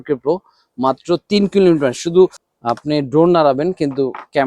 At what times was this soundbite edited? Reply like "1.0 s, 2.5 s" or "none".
2.5 s